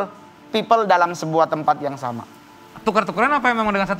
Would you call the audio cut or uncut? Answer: cut